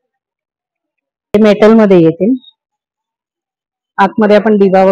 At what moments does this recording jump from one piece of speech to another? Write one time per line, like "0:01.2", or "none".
0:01.3